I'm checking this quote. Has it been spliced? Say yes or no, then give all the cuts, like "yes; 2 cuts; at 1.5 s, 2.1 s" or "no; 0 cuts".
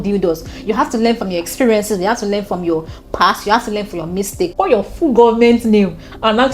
yes; 1 cut; at 4.5 s